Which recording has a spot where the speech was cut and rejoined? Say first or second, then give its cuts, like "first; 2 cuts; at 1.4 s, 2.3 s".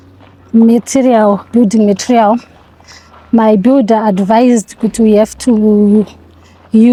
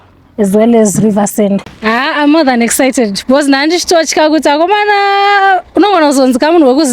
second; 1 cut; at 1.7 s